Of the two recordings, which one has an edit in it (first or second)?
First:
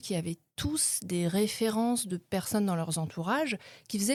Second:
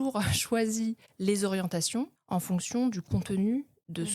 second